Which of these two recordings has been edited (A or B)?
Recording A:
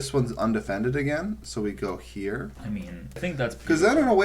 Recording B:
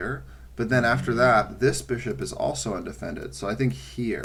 A